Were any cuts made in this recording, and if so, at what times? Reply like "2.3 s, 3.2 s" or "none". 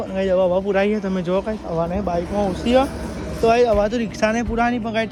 none